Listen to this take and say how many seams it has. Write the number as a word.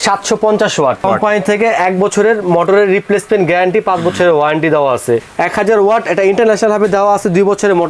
two